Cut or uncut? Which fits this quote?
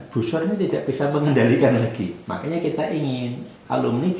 cut